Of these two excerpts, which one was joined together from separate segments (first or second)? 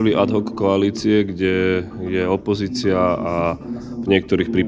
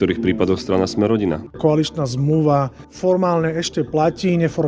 second